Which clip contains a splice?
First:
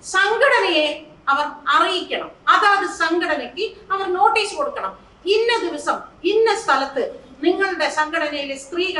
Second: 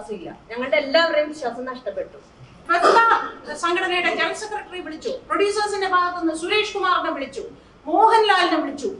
second; 1 cut; at 2.6 s

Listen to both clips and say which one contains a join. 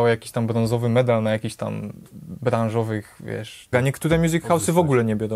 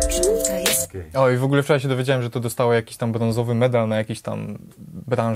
first; 1 cut; at 3.7 s

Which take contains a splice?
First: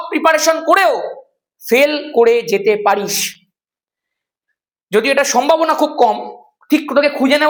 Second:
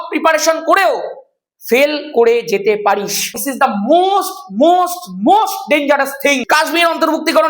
second; 2 cuts; at 3.6 s, 6.2 s

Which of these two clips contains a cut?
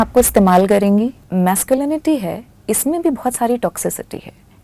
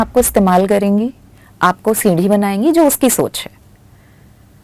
first; 1 cut; at 1.2 s

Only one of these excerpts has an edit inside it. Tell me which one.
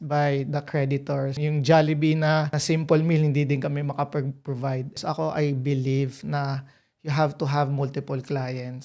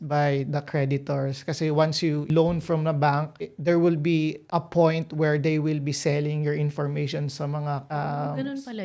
first; 2 cuts; at 1.4 s, 4.9 s

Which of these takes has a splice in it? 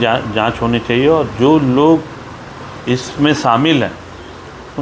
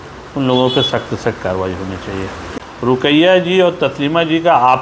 second; 1 cut; at 2.4 s

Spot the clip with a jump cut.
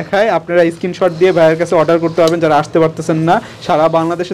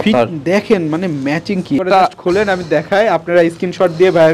second; 1 cut; at 1.8 s

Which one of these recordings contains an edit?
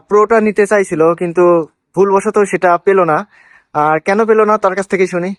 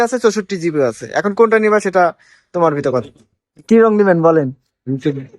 second; 1 cut; at 3.7 s

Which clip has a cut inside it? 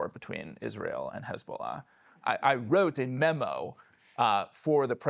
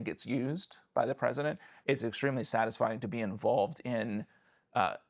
first; 1 cut; at 2.2 s

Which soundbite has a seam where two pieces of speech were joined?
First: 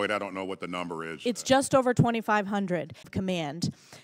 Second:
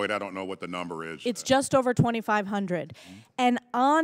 second; 1 cut; at 3.1 s

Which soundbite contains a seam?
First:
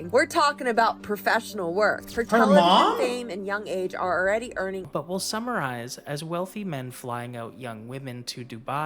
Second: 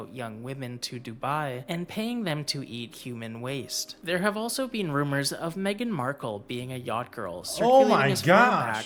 first; 1 cut; at 4.9 s

